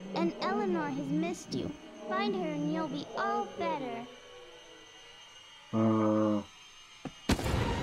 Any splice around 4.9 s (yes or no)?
no